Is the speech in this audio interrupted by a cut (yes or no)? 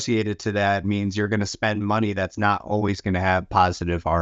no